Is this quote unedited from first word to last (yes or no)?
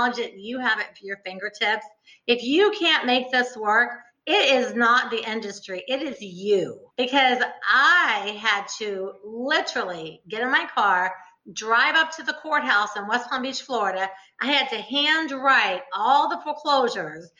no